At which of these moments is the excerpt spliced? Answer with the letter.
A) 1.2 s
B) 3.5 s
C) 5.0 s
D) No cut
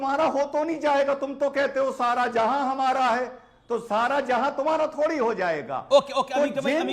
D